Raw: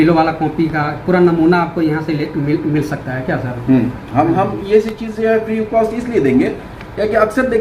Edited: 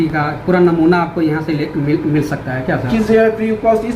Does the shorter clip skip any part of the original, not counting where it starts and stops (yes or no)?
yes